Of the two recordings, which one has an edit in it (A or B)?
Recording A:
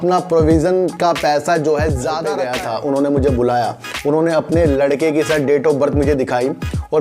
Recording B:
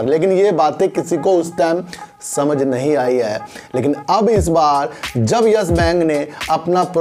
A